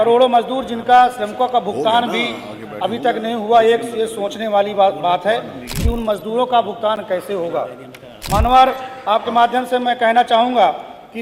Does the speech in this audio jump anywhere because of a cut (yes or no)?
no